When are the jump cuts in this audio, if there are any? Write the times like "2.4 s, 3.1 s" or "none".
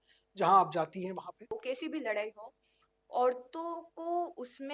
1.5 s

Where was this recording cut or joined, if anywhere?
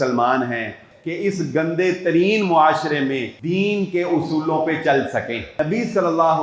0.9 s, 3.3 s, 5.6 s

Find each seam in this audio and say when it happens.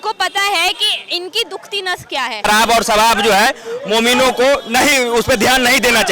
2.5 s

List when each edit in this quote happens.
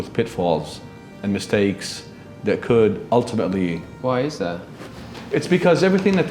none

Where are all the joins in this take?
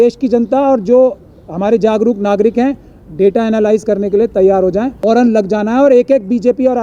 5.0 s

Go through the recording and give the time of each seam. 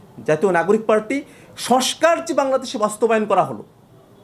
none

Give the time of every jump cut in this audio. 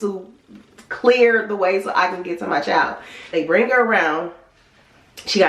3.2 s

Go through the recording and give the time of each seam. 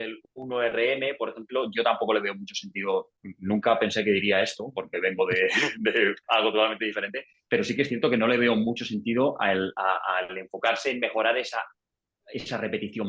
none

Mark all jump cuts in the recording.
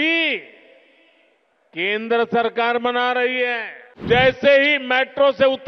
4.0 s

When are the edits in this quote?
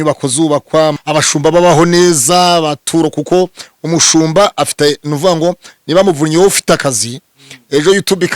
1.0 s

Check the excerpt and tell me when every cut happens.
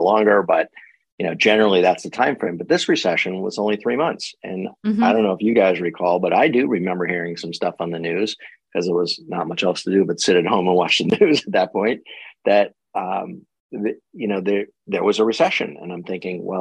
none

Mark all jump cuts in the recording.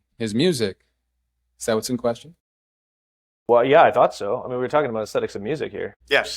none

